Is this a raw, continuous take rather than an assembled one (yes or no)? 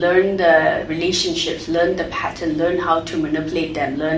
yes